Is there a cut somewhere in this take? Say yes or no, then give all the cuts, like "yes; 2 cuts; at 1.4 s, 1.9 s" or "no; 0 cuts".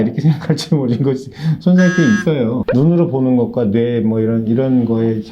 yes; 1 cut; at 2.6 s